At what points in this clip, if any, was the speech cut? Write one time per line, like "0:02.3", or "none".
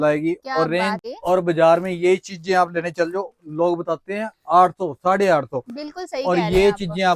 0:01.0